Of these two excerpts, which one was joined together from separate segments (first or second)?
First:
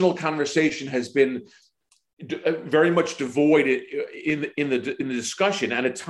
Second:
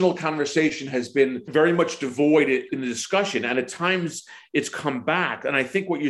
second